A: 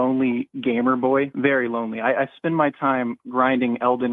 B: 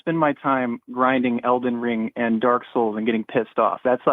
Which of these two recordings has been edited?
A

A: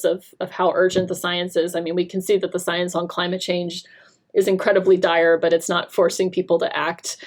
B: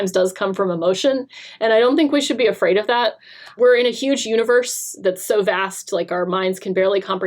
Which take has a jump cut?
B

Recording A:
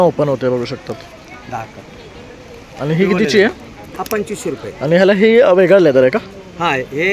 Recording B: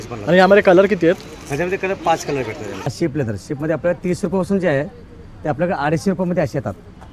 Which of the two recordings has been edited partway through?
B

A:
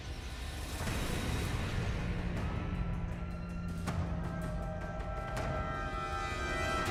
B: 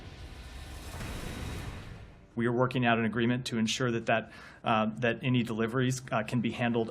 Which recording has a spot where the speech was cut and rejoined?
B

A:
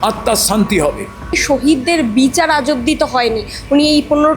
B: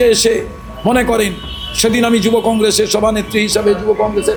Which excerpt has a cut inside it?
A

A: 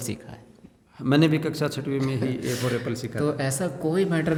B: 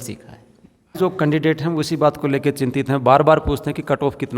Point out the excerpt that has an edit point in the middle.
B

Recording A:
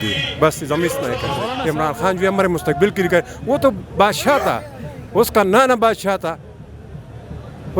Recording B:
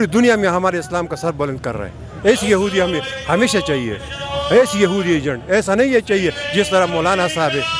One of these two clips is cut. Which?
A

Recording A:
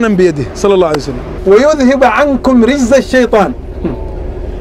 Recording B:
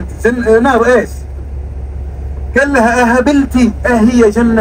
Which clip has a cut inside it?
A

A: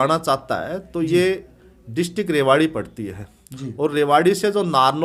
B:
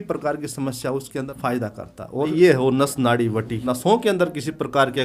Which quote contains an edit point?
B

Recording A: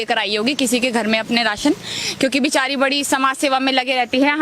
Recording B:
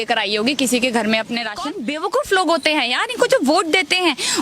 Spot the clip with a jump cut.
B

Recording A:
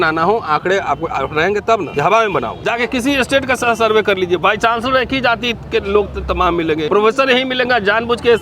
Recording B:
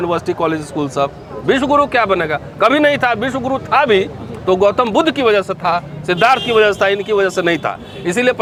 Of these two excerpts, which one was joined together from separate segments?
A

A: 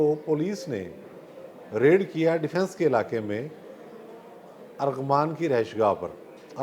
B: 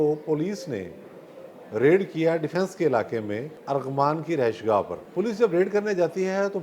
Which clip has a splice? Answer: B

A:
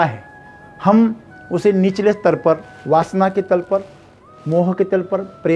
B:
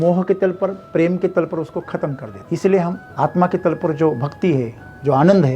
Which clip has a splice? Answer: B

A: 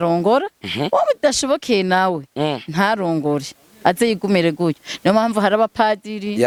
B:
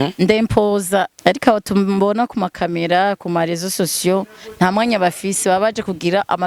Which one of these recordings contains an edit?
B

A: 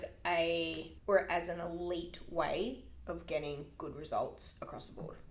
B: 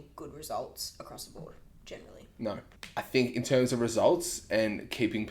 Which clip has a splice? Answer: B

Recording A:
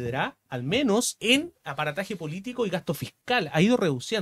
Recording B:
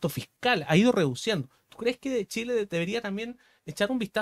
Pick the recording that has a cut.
A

